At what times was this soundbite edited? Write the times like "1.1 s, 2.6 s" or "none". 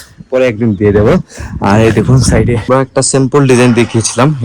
2.7 s